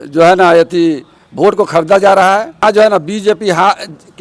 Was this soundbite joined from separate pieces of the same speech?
yes; 1 cut; at 2.6 s

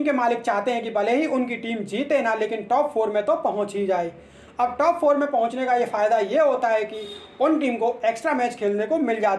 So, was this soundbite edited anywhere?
no; 0 cuts

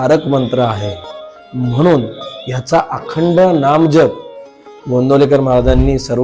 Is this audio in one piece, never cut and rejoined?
yes; 0 cuts

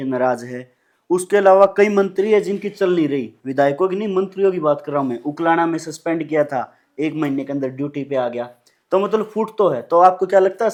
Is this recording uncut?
yes; 0 cuts

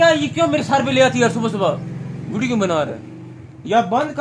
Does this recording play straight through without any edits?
yes; 0 cuts

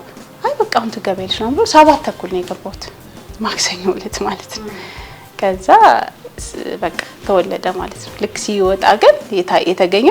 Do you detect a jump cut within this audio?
no; 0 cuts

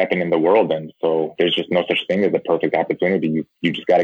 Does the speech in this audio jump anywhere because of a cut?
yes; 1 cut; at 1.3 s

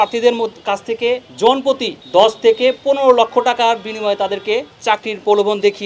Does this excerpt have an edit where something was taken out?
yes; 3 cuts; at 1.3 s, 1.9 s, 4.7 s

